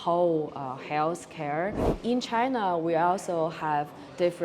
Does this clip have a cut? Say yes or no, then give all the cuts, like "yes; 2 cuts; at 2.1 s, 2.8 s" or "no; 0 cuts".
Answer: yes; 1 cut; at 1.9 s